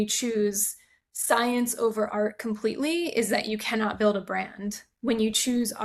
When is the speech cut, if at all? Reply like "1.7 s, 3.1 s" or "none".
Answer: none

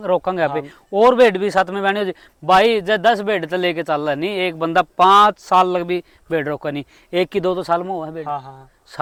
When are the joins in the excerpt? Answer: none

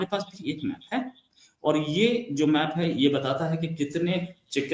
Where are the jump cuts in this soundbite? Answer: none

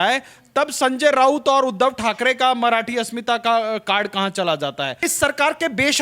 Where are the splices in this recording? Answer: 5.0 s

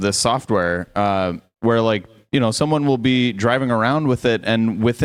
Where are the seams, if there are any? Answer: none

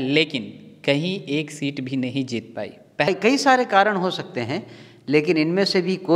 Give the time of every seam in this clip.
3.1 s

